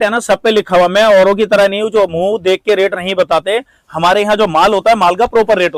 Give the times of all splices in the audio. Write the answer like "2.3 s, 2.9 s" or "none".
none